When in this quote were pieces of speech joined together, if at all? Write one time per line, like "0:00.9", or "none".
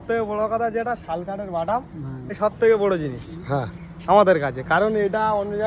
0:02.4